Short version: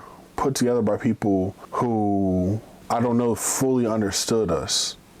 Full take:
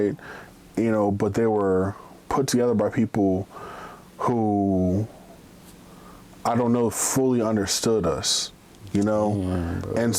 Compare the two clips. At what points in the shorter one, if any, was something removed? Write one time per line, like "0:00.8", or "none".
0:01.6
0:02.7